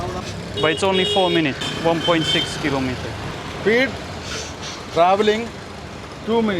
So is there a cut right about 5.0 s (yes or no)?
no